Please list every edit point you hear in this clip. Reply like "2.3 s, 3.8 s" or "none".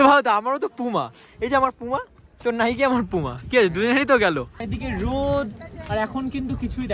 4.6 s